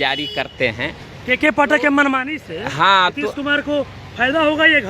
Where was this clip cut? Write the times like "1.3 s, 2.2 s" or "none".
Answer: none